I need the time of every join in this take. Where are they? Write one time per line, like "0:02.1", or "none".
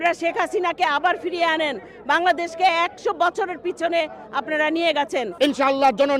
0:05.3